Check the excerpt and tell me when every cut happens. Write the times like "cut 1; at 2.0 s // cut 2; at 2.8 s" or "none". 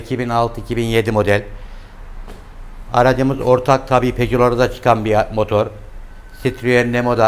none